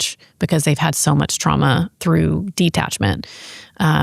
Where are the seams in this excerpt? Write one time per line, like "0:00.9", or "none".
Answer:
0:01.9

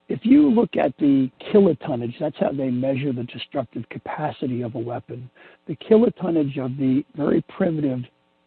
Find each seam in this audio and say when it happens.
0:01.4

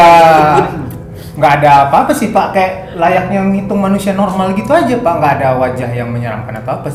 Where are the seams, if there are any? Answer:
none

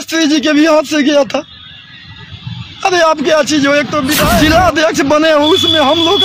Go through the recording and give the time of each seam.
0:04.3

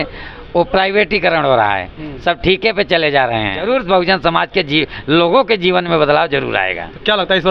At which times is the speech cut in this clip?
0:03.6

